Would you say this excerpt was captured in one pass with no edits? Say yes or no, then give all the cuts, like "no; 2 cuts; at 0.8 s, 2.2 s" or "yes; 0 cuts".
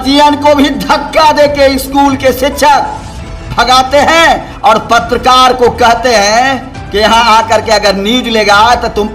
yes; 0 cuts